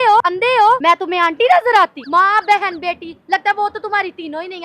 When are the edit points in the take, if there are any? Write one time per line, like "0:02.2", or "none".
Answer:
0:00.8
0:02.0